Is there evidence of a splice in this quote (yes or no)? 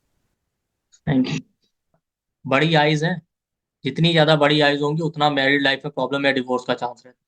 yes